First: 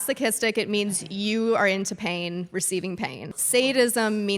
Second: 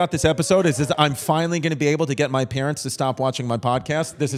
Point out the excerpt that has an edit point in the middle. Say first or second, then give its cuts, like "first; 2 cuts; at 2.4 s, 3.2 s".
first; 1 cut; at 3.3 s